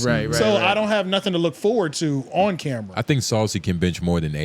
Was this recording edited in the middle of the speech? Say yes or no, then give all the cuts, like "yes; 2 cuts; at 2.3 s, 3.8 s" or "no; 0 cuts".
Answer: yes; 1 cut; at 2.9 s